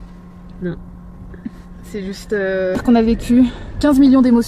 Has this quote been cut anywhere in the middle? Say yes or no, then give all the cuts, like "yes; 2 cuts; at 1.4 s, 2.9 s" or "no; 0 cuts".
yes; 1 cut; at 2.8 s